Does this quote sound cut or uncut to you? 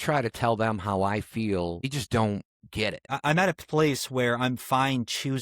cut